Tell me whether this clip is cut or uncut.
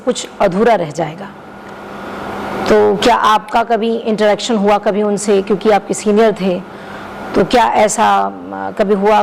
uncut